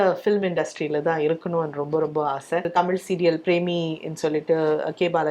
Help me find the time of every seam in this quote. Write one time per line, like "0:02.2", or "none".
0:02.7